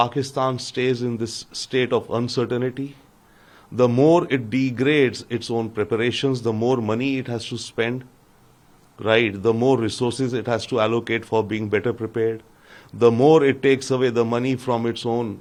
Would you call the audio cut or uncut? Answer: uncut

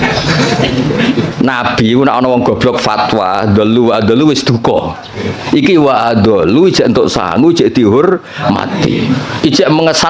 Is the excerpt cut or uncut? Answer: uncut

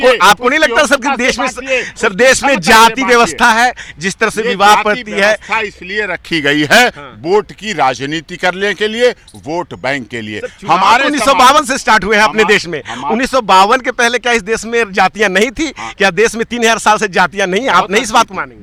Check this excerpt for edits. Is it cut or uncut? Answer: uncut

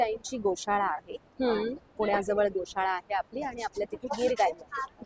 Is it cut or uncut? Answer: uncut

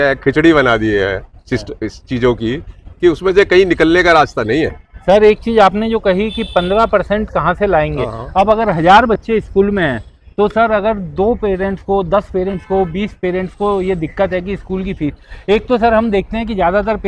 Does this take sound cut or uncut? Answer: uncut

